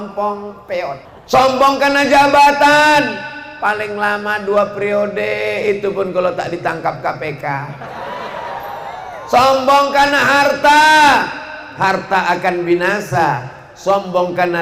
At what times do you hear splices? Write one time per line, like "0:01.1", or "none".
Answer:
0:01.1